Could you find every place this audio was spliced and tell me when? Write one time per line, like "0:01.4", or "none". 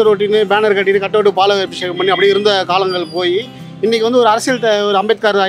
none